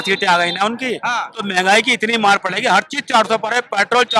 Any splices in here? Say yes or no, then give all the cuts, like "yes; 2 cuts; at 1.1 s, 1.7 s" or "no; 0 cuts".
no; 0 cuts